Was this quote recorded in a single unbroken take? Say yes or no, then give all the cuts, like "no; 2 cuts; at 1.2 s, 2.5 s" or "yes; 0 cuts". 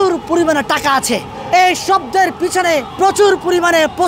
no; 2 cuts; at 1.3 s, 2.9 s